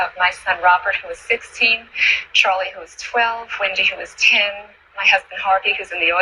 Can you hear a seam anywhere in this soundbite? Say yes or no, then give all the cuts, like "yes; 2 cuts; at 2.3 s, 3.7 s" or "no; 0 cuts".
yes; 1 cut; at 4.9 s